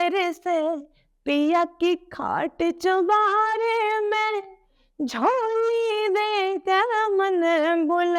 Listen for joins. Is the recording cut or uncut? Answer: uncut